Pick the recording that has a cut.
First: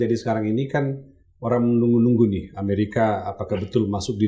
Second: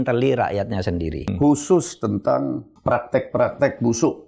second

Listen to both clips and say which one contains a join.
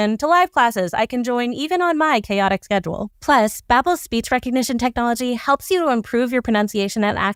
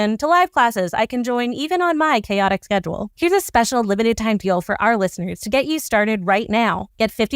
second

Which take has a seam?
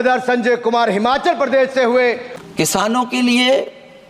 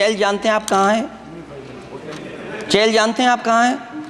first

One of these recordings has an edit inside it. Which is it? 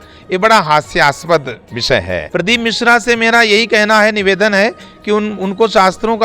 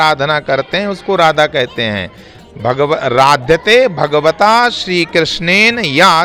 first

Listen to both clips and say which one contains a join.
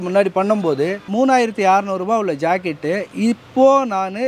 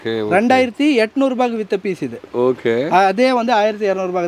first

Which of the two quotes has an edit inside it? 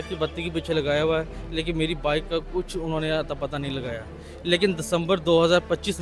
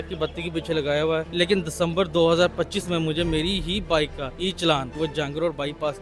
second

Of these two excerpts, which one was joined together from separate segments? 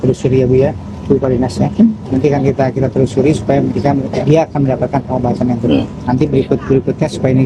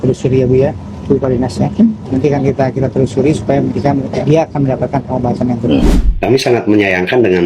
second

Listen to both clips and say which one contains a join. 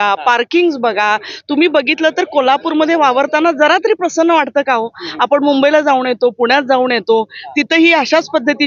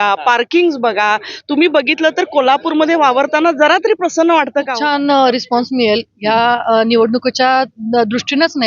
second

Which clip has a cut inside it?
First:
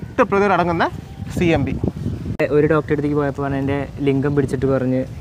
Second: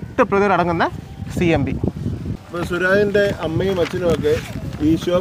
first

